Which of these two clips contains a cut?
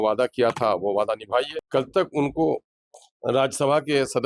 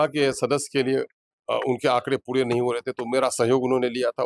first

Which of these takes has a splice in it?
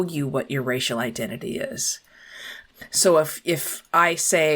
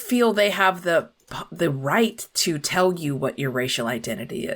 first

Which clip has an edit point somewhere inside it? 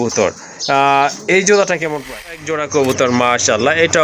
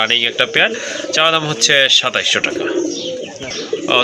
first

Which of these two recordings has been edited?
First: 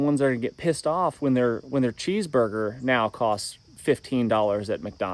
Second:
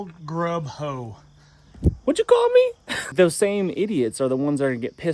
second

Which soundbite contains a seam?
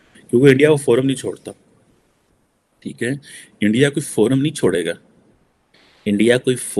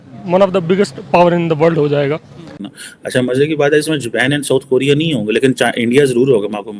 second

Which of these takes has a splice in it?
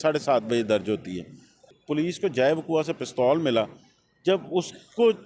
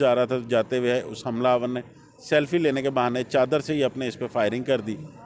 first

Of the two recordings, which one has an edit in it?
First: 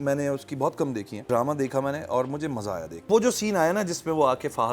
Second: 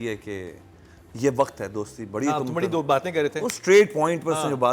first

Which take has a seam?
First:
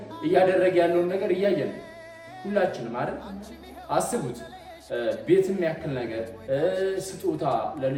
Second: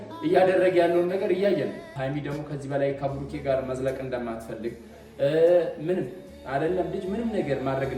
second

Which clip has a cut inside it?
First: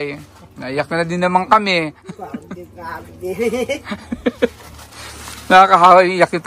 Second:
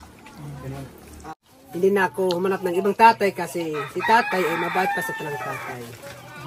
second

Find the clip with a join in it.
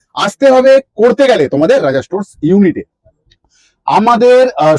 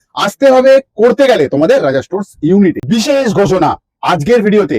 second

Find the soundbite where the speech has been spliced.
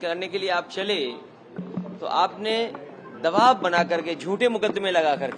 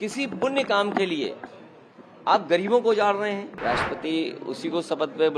second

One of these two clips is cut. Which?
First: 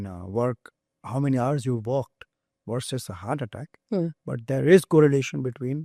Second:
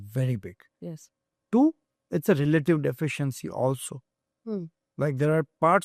second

